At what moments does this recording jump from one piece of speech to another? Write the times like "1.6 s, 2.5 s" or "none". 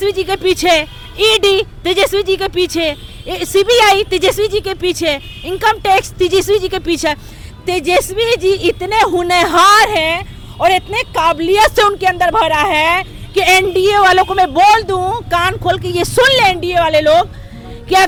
none